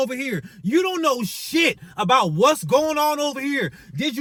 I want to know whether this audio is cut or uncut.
uncut